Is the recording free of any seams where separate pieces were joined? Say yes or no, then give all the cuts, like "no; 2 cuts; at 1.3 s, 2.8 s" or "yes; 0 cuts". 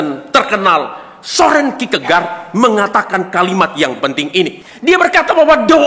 no; 1 cut; at 4.6 s